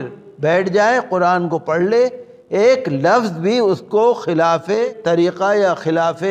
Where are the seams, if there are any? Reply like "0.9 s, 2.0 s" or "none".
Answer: 4.9 s

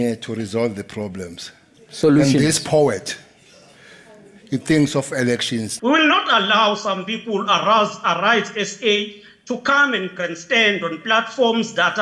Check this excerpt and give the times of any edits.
5.7 s

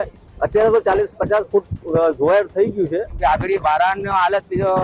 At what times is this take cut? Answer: 3.1 s

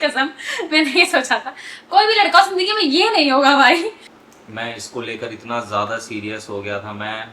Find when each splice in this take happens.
4.1 s

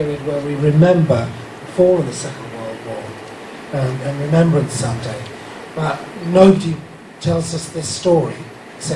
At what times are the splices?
none

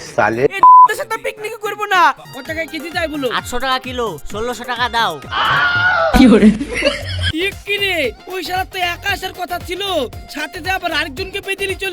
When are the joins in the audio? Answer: 2.2 s, 7.2 s

